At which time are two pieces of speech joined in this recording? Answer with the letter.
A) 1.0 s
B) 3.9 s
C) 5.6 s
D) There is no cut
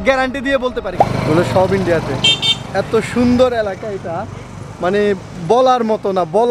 A